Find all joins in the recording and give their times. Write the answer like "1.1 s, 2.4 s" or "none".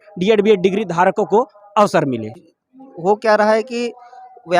2.4 s